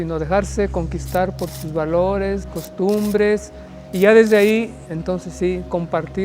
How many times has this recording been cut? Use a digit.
1